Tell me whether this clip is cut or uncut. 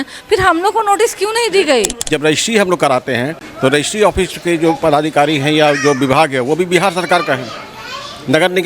cut